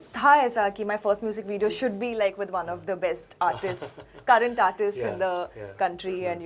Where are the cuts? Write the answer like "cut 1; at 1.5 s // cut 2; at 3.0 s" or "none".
none